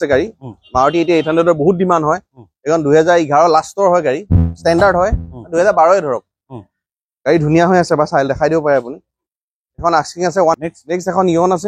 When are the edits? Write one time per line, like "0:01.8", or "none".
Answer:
0:10.6